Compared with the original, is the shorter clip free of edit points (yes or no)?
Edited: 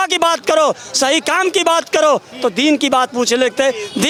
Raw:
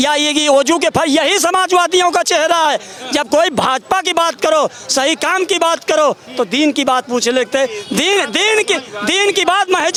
yes